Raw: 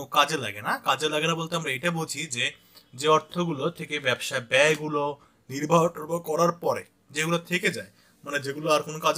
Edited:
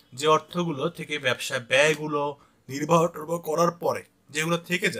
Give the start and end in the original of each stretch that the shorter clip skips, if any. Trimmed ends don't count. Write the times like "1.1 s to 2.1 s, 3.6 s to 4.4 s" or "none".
none

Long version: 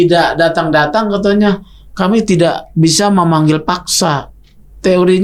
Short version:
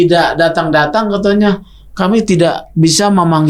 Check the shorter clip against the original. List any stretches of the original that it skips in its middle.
none

